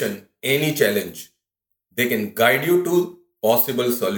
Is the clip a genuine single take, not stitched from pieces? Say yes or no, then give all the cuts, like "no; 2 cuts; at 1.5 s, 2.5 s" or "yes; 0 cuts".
yes; 0 cuts